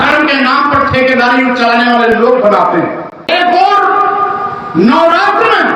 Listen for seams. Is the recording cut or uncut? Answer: cut